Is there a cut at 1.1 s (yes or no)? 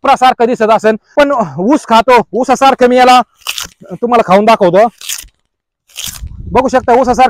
yes